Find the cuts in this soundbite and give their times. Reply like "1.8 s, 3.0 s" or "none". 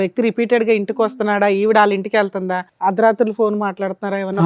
2.6 s